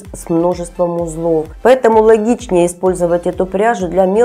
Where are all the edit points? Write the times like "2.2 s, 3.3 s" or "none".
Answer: 1.5 s

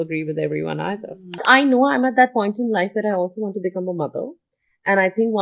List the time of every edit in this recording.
1.4 s

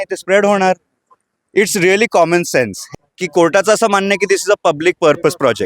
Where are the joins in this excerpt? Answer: 2.9 s

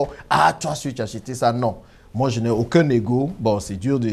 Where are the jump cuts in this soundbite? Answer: none

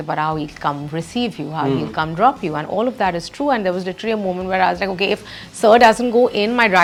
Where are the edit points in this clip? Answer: none

